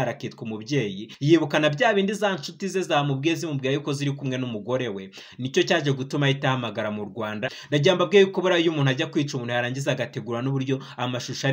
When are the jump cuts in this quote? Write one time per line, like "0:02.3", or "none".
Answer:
0:01.1
0:07.5